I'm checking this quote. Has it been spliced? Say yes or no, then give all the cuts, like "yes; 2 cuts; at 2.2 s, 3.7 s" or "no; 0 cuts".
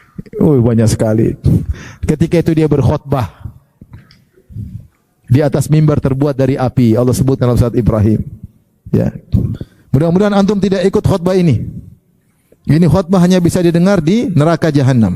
yes; 1 cut; at 9.7 s